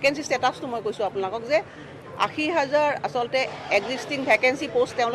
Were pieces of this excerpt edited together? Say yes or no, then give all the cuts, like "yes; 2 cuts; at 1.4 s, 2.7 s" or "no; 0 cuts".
yes; 1 cut; at 1.1 s